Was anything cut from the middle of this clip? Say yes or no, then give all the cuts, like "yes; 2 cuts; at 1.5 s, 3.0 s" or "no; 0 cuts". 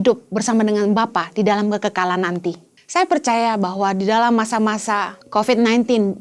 yes; 2 cuts; at 2.7 s, 5.2 s